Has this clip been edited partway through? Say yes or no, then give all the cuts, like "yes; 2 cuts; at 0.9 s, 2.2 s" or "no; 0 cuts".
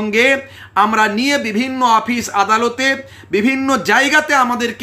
no; 0 cuts